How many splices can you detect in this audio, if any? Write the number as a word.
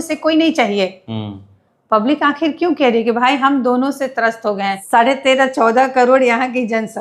one